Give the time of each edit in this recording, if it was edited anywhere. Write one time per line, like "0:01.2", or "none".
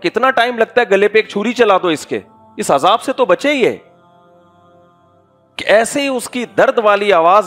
none